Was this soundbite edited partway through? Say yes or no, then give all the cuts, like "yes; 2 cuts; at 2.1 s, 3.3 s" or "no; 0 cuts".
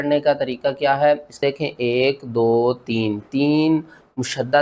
yes; 1 cut; at 1.4 s